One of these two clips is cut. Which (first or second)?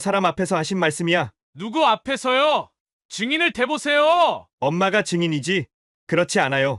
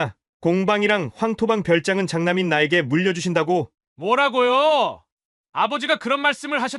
second